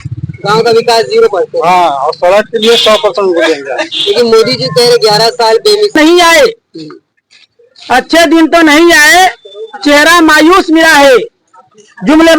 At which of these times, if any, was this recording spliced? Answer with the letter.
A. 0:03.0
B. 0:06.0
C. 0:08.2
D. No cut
B